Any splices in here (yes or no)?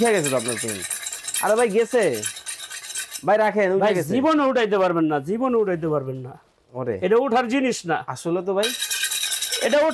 no